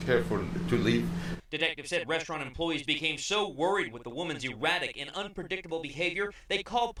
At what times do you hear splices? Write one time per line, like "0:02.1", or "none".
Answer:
none